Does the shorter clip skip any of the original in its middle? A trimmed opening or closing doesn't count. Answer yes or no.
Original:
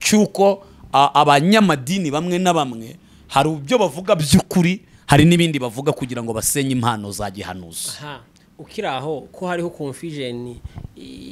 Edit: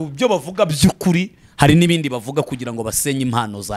no